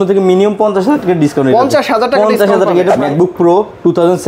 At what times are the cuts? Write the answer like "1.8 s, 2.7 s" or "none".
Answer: 3.0 s